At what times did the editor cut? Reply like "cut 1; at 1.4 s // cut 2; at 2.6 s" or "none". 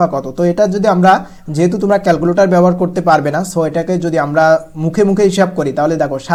none